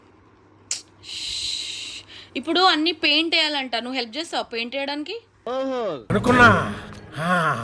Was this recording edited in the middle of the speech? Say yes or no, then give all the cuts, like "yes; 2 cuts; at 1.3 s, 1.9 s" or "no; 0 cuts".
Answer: no; 0 cuts